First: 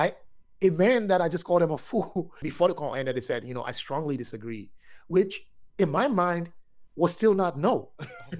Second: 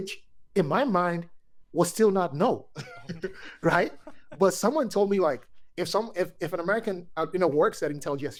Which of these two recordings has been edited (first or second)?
first